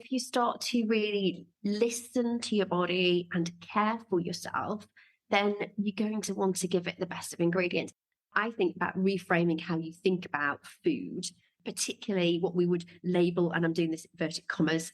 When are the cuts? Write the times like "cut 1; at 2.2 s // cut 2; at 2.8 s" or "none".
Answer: cut 1; at 8.0 s // cut 2; at 11.5 s